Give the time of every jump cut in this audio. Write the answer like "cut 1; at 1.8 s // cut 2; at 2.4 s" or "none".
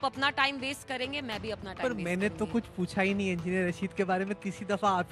none